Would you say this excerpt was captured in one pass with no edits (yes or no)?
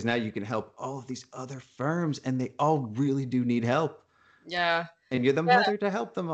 yes